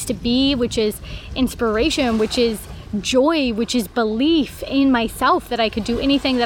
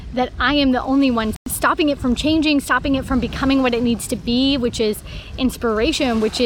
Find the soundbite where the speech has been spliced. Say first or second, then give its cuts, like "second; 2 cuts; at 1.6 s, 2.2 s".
second; 1 cut; at 1.5 s